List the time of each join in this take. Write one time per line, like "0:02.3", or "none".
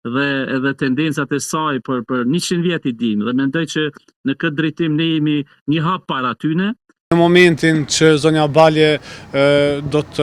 0:06.9